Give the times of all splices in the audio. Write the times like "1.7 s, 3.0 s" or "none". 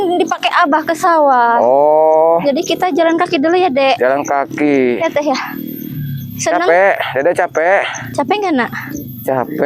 none